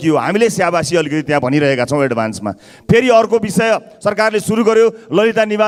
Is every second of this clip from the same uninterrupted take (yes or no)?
yes